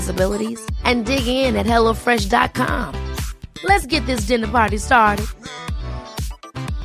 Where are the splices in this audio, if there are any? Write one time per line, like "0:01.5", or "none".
none